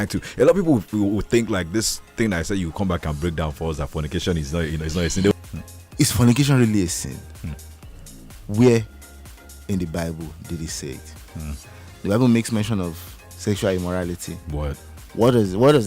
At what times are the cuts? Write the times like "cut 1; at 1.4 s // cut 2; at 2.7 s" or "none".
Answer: cut 1; at 5.3 s